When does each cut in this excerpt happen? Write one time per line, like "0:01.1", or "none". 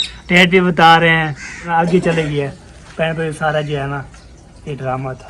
0:01.7